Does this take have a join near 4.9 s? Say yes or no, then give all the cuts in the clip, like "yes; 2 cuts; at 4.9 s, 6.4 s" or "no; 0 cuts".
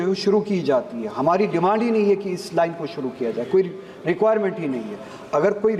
no; 0 cuts